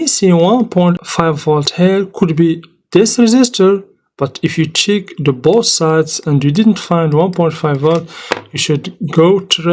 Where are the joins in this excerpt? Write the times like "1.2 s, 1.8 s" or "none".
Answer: 1.0 s